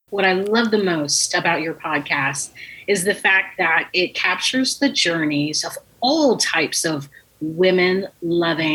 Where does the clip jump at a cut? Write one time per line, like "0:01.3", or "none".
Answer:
none